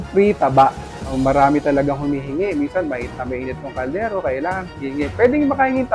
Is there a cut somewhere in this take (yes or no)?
yes